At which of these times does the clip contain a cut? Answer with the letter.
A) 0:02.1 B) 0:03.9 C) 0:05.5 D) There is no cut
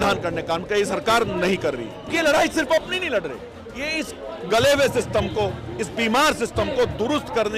A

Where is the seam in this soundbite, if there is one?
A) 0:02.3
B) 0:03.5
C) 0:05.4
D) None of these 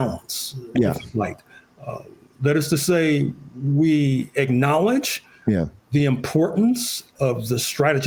D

